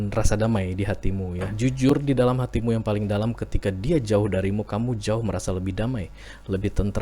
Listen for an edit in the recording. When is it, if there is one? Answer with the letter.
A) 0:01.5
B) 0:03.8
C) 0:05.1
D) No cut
A